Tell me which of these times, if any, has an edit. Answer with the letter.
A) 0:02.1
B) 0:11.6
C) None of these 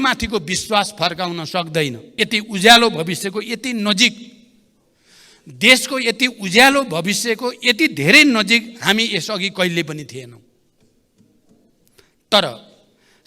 A